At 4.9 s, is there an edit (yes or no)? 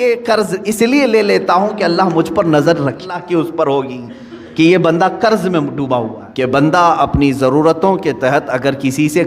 no